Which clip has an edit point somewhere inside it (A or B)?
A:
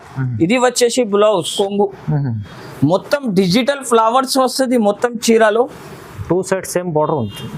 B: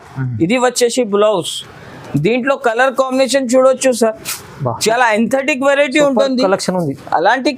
A